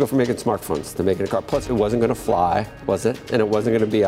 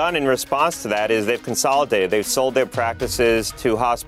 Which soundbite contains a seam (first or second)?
first